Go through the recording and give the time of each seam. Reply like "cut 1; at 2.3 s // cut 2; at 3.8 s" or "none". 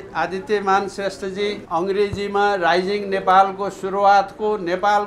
cut 1; at 1.6 s